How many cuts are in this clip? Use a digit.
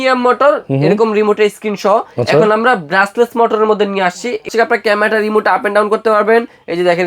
1